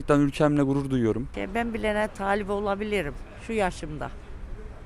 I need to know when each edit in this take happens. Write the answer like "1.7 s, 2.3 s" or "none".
1.4 s